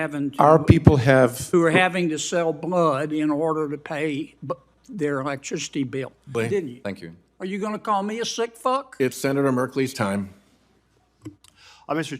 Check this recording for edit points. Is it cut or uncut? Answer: cut